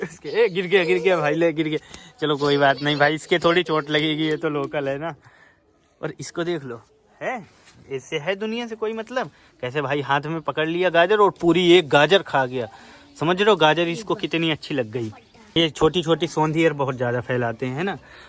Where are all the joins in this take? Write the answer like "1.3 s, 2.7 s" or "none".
15.6 s